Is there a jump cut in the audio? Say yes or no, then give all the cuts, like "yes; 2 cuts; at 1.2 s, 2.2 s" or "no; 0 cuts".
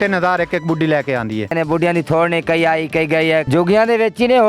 yes; 2 cuts; at 1.5 s, 3.5 s